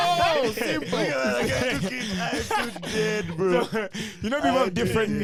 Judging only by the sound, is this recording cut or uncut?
uncut